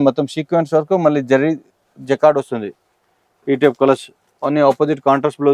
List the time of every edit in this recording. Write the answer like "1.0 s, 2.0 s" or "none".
none